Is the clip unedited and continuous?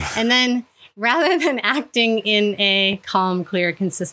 yes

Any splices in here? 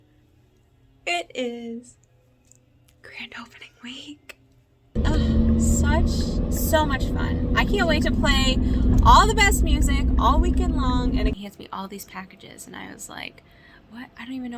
yes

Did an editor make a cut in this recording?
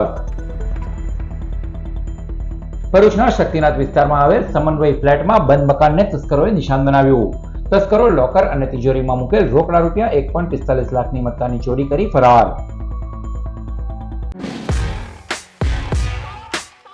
yes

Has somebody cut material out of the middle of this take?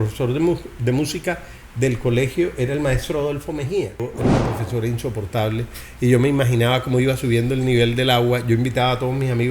yes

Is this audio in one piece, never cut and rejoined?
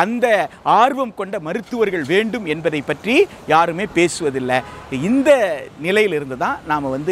yes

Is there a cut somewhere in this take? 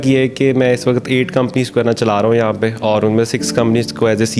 no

